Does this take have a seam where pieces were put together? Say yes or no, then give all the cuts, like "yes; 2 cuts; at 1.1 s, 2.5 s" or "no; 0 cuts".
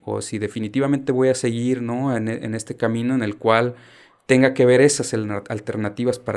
no; 0 cuts